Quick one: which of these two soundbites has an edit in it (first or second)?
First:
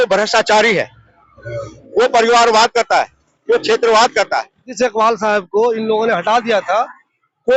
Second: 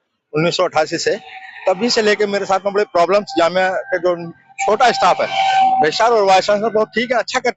first